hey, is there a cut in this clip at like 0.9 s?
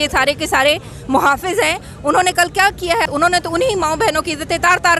no; 1 cut; at 3.0 s

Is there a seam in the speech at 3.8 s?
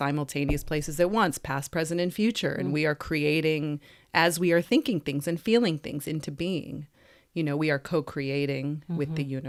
no; 0 cuts

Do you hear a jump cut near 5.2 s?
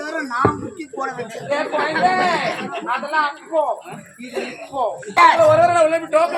yes; 1 cut; at 5.2 s

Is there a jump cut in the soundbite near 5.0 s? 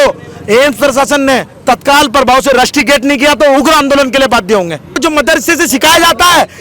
yes; 1 cut; at 5.0 s

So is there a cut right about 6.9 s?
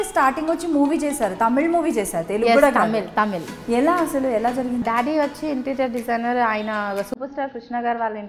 no; 1 cut; at 4.8 s

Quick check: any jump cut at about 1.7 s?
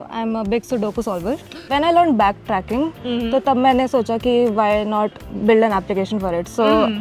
yes; 1 cut; at 1.7 s

